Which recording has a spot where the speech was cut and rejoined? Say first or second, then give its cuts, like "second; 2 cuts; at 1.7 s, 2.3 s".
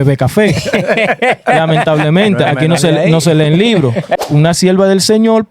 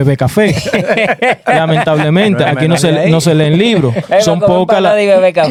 first; 1 cut; at 4.1 s